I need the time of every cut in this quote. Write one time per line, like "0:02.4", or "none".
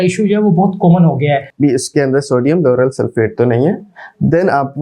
0:01.5